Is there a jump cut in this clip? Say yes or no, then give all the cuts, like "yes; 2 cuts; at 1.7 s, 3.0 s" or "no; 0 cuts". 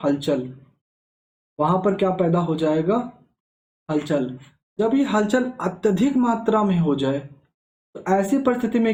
no; 0 cuts